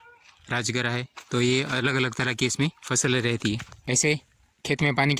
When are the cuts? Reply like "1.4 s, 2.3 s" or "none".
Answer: 3.7 s